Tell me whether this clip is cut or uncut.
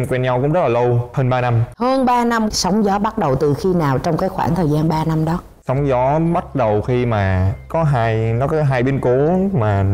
uncut